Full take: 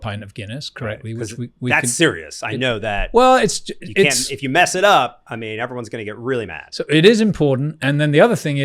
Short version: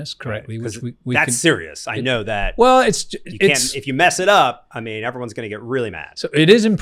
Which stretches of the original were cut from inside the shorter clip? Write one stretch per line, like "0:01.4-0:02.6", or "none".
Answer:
none